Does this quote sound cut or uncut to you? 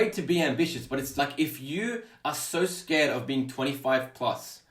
cut